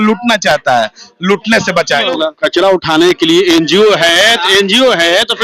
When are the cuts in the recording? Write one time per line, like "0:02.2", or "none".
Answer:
0:02.1